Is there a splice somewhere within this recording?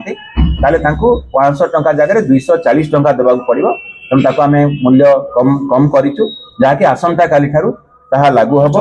no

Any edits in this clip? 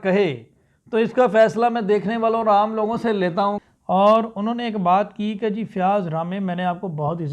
yes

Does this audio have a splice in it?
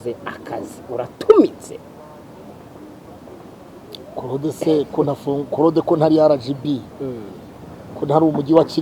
no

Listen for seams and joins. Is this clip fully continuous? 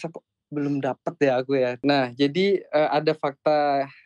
no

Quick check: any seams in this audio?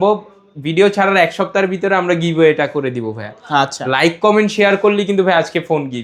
no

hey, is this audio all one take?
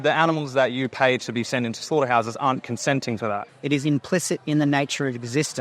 no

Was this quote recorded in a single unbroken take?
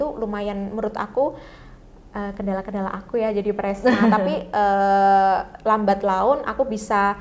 yes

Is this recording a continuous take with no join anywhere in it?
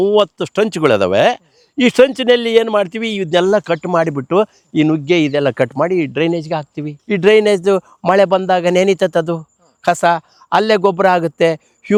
yes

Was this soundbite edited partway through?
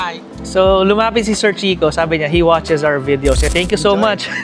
no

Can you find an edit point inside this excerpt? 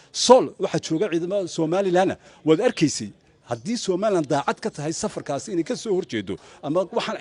no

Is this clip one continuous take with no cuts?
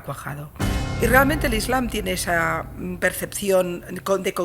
no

